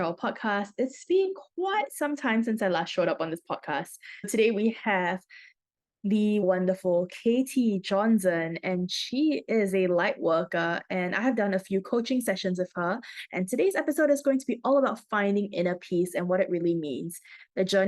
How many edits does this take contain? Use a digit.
2